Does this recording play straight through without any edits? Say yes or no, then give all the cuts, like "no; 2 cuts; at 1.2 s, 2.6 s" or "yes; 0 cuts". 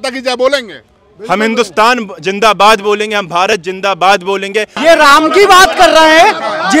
no; 1 cut; at 4.7 s